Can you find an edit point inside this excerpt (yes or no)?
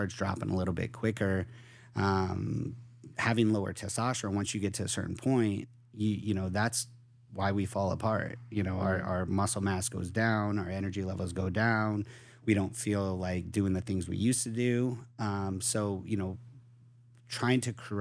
no